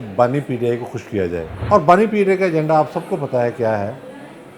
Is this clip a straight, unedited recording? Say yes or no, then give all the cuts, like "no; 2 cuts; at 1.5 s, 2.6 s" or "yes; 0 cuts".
no; 1 cut; at 1.5 s